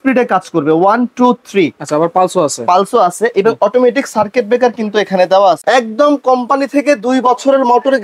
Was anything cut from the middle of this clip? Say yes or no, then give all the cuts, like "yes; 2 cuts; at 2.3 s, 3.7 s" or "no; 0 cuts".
yes; 1 cut; at 5.6 s